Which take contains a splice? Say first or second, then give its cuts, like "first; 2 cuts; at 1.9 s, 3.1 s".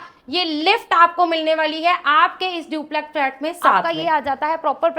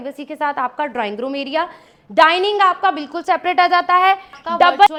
first; 1 cut; at 3.8 s